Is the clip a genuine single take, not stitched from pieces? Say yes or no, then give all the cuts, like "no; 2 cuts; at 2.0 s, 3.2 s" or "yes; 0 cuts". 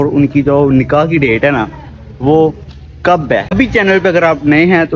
no; 1 cut; at 3.5 s